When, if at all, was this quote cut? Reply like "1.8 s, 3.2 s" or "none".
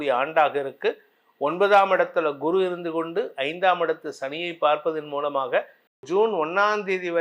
6.0 s